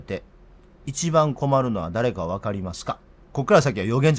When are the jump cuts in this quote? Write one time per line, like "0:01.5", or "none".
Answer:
0:03.1